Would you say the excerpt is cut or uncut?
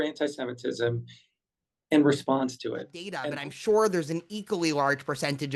cut